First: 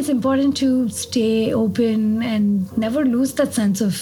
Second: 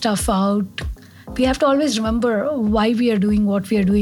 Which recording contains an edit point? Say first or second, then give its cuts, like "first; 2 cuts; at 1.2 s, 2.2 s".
second; 1 cut; at 1.3 s